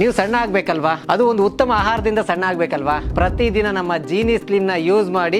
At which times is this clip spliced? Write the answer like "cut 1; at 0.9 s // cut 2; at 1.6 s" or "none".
none

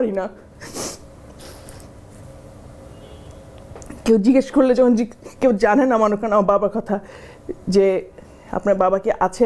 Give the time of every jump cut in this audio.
none

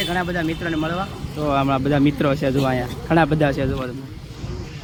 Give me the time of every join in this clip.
none

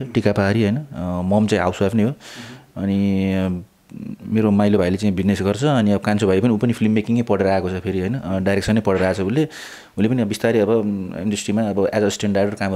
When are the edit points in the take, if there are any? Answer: none

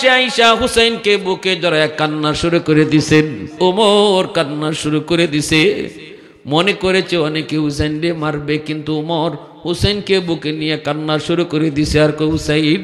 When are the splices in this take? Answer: cut 1; at 3.4 s

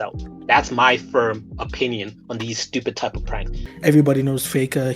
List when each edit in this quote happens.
cut 1; at 3.6 s

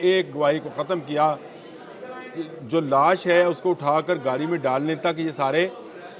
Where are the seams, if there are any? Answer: none

